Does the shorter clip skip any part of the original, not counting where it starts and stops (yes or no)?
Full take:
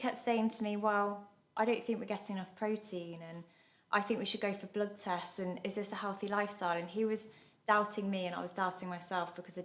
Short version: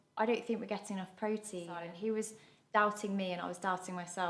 yes